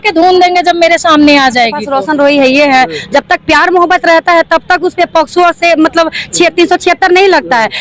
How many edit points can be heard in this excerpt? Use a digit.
1